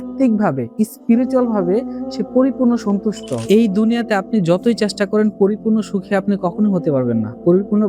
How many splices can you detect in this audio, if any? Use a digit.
1